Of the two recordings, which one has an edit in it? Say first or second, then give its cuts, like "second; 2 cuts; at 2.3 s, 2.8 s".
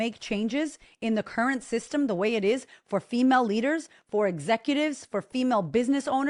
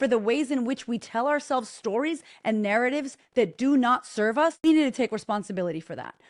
second; 1 cut; at 4.6 s